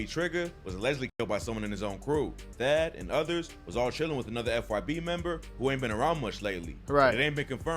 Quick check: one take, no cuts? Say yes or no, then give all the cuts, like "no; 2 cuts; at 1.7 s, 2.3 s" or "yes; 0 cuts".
no; 1 cut; at 2.4 s